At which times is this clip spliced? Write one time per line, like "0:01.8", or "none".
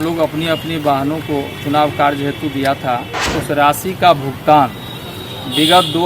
0:03.2